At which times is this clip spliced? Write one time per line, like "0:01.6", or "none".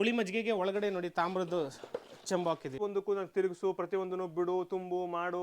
0:02.8